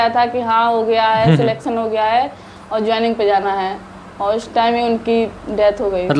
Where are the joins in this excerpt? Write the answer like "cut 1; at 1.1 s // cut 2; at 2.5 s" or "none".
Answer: none